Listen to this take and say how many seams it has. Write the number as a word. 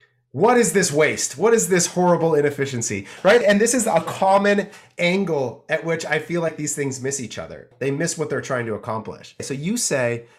three